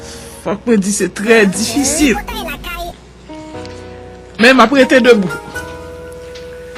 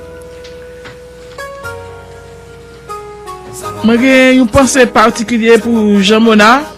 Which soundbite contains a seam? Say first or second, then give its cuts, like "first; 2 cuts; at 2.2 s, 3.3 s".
second; 1 cut; at 3.3 s